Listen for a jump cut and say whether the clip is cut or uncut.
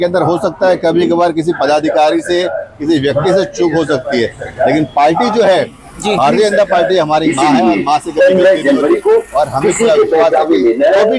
uncut